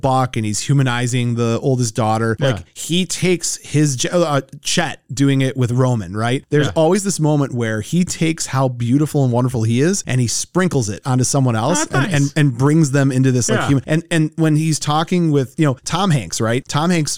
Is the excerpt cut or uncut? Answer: uncut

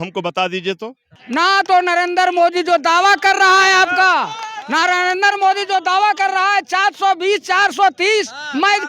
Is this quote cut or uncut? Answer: cut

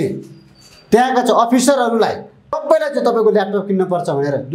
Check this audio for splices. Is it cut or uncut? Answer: cut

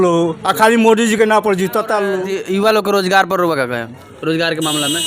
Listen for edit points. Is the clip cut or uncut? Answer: cut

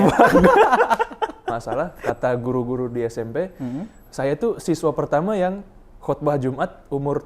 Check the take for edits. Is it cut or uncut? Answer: cut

